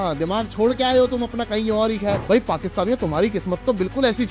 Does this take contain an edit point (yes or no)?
yes